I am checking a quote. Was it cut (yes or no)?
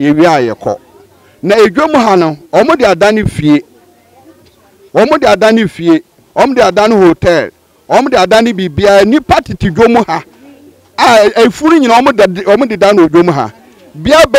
no